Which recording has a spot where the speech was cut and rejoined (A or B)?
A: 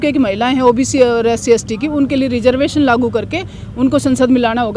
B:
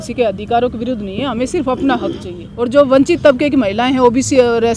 B